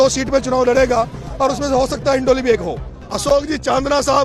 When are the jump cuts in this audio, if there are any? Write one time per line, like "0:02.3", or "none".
0:03.3